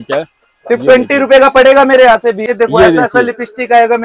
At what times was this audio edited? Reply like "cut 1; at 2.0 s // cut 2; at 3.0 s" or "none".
cut 1; at 2.4 s